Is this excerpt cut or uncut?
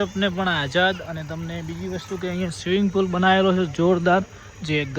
uncut